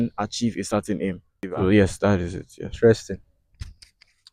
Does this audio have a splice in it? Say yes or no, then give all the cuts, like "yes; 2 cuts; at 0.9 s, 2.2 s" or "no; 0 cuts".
no; 0 cuts